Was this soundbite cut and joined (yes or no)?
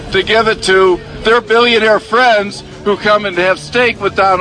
no